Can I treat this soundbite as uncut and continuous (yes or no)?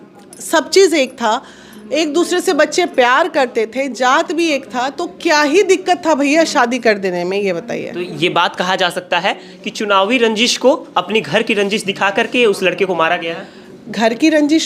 yes